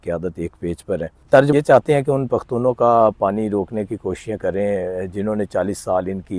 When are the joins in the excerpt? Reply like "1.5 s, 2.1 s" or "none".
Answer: 1.5 s